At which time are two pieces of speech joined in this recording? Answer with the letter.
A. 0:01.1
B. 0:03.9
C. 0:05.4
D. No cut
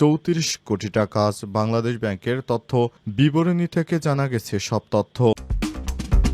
C